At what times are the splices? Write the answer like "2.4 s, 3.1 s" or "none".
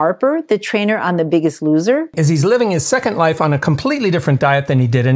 2.1 s